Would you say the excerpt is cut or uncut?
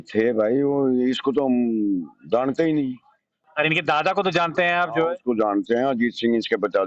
uncut